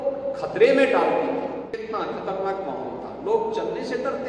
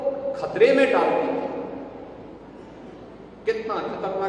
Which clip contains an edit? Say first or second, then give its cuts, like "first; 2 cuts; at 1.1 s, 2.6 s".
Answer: first; 1 cut; at 1.8 s